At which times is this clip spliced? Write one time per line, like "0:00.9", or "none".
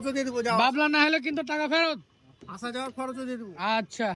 none